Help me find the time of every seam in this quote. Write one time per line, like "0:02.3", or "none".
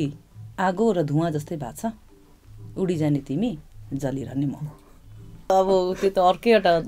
0:05.5

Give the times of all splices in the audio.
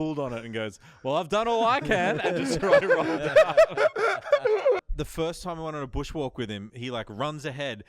0:04.8

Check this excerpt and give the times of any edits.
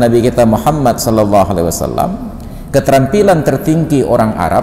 none

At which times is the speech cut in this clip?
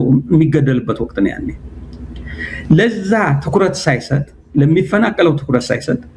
none

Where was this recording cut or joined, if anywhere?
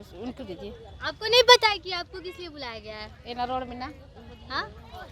none

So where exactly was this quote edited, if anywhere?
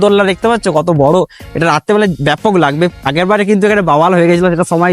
none

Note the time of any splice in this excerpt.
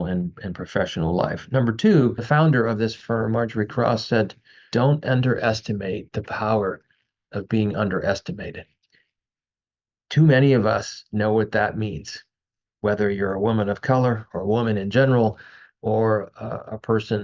0:02.2
0:04.7

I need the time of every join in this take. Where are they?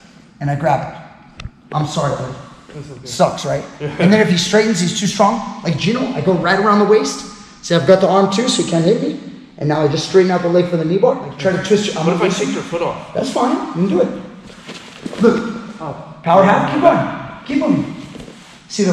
0:11.3

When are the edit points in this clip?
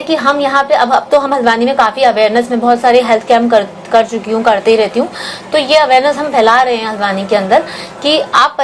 none

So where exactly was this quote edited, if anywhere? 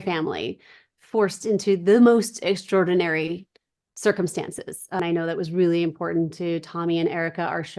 0:05.0

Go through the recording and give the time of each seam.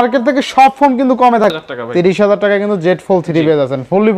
0:01.4

